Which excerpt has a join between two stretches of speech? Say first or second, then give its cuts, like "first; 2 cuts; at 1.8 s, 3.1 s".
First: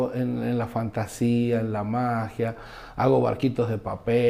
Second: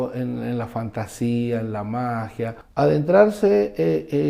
second; 1 cut; at 2.6 s